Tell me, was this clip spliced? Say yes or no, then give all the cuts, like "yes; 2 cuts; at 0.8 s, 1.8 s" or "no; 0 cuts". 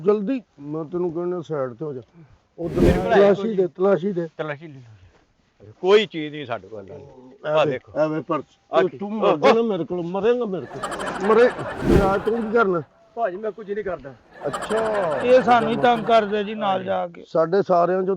yes; 2 cuts; at 2.9 s, 12.0 s